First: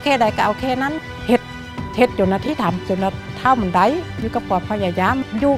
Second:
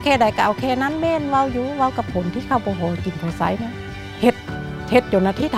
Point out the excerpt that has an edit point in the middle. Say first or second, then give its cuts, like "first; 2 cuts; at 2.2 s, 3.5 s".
first; 1 cut; at 0.9 s